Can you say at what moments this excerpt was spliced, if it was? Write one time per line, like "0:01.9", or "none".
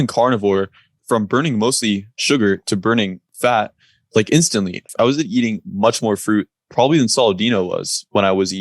0:01.0
0:02.1
0:03.2
0:04.9